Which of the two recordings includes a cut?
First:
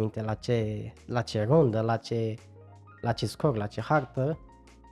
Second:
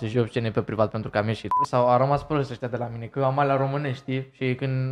second; 1 cut; at 1.6 s

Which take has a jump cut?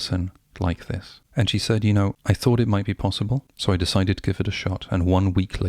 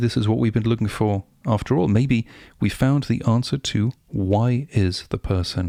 first; 3 cuts; at 1.1 s, 2.2 s, 3.5 s

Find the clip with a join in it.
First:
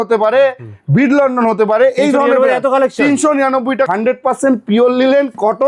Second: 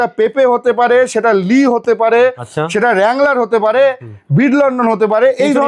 first; 1 cut; at 3.9 s

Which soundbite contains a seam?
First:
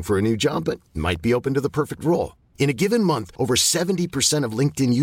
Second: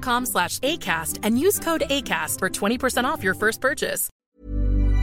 second; 1 cut; at 4.1 s

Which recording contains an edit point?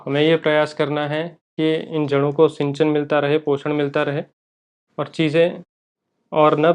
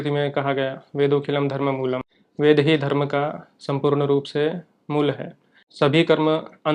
second; 2 cuts; at 2.1 s, 5.7 s

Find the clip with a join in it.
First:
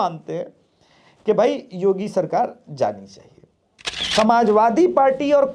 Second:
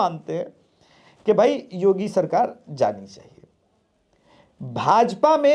first; 1 cut; at 4.0 s

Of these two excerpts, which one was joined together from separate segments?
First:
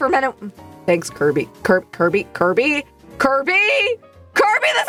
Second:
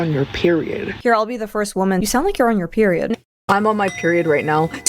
second; 1 cut; at 3.1 s

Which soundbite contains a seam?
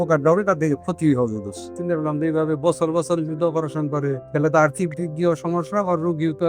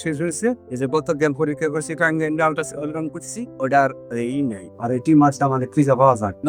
first; 2 cuts; at 1.7 s, 4.2 s

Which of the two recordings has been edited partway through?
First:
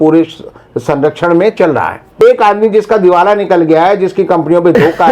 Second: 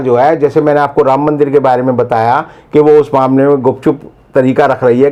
first; 1 cut; at 2.2 s

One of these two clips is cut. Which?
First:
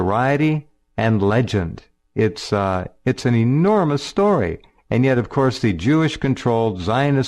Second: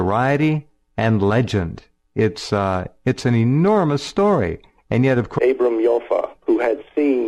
first; 1 cut; at 5.3 s

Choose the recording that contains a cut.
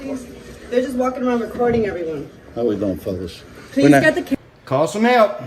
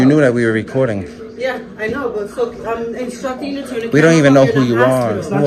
first; 1 cut; at 4.3 s

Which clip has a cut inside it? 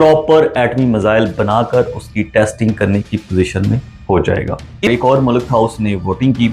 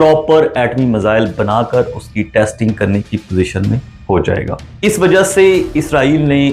first; 1 cut; at 4.9 s

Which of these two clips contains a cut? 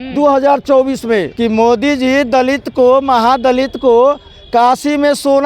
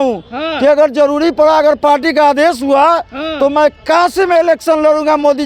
first; 1 cut; at 1.3 s

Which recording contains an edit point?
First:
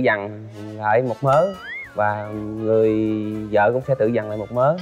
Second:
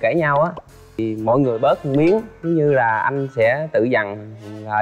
second; 1 cut; at 1.0 s

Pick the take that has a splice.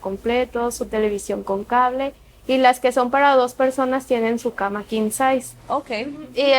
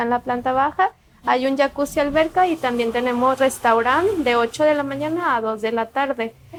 first; 1 cut; at 5.6 s

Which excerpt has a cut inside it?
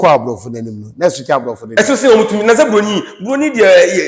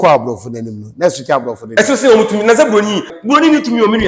second; 1 cut; at 3.1 s

